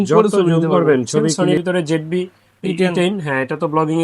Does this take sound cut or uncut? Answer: cut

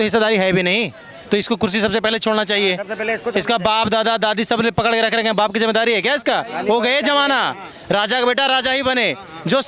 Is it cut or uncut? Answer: uncut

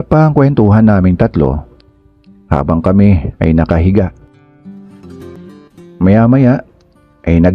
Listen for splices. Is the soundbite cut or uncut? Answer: cut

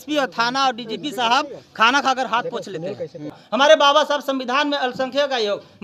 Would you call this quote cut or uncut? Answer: cut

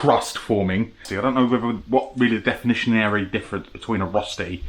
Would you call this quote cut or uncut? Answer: cut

